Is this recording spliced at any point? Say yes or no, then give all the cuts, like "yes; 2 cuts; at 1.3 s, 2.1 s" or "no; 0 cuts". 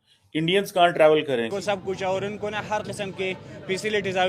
yes; 1 cut; at 1.5 s